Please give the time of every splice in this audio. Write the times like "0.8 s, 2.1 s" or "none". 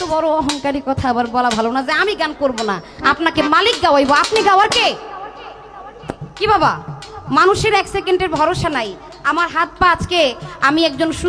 none